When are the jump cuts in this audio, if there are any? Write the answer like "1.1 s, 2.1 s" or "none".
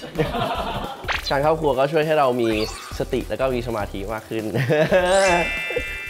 1.2 s